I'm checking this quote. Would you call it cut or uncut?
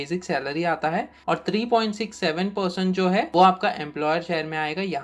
cut